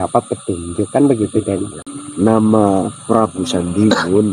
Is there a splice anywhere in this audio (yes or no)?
yes